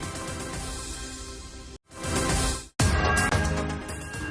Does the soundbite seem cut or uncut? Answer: cut